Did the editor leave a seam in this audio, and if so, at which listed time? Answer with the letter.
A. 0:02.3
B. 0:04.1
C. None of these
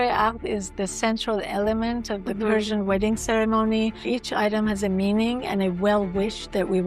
B